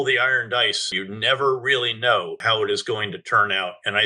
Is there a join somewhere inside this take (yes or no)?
yes